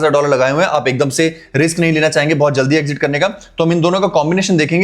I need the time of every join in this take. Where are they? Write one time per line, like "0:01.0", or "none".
none